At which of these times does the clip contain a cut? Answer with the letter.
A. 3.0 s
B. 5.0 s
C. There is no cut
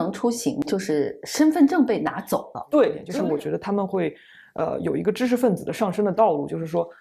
A